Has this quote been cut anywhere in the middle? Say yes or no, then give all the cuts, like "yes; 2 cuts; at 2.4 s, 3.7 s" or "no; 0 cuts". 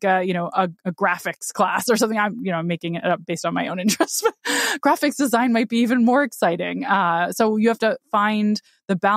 no; 0 cuts